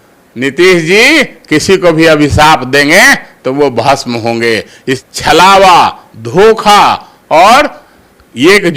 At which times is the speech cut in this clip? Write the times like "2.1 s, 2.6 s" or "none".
5.0 s

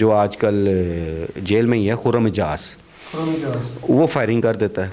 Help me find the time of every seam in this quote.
none

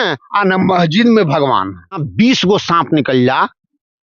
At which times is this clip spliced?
2.1 s

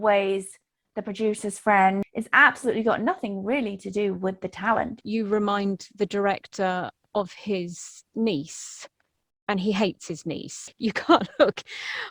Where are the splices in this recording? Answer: 2.1 s, 5.0 s, 10.6 s

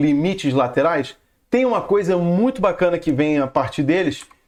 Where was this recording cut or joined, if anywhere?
none

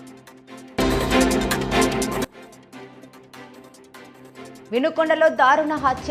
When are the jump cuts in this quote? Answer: 4.6 s

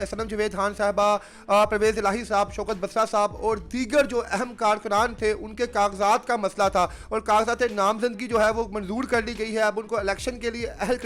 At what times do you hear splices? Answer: none

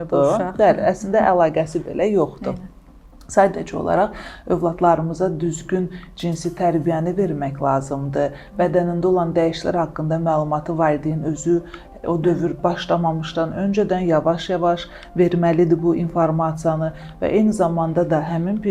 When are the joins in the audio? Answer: none

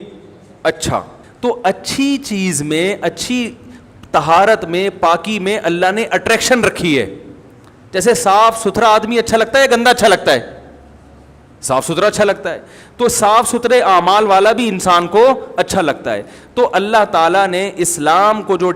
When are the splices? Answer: 1.2 s

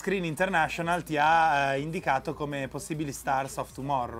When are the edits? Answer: 3.2 s

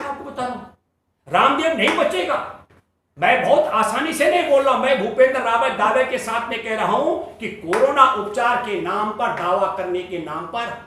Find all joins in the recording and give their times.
none

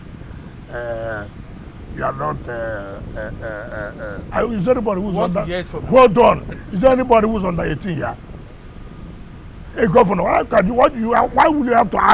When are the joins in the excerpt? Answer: none

